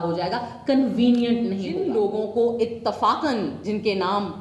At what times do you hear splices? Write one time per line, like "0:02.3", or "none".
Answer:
0:01.8